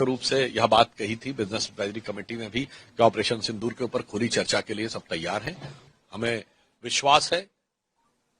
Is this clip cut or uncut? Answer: cut